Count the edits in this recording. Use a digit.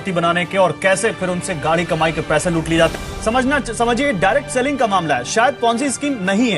1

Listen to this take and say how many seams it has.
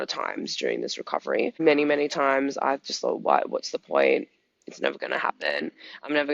1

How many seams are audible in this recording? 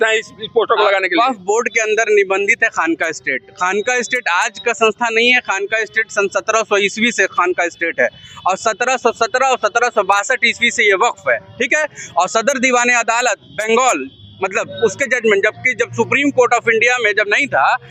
0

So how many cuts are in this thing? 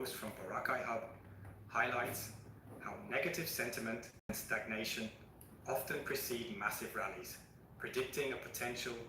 1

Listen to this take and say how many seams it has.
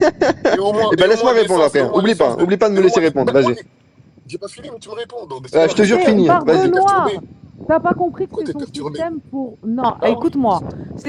0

